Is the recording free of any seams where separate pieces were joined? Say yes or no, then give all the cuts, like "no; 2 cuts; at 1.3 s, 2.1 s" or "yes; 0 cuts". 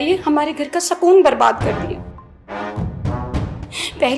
yes; 0 cuts